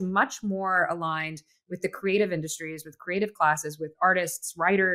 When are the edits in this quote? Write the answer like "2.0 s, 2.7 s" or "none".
none